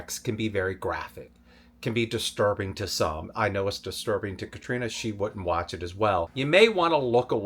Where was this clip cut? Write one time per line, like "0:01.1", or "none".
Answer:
0:06.3